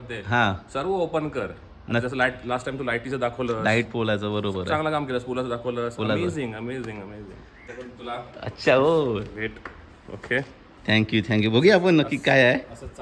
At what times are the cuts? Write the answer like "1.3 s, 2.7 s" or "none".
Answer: 7.6 s

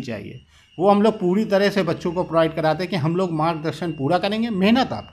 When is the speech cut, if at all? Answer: none

